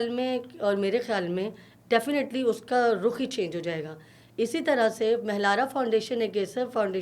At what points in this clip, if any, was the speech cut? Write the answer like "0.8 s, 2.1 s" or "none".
none